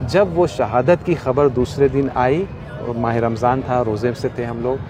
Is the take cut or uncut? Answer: uncut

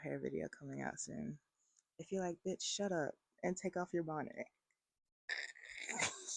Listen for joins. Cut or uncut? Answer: uncut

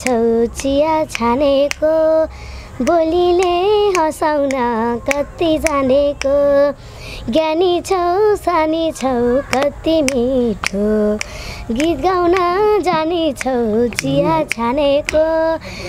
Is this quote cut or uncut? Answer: uncut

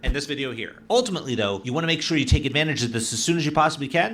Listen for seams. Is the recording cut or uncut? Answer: cut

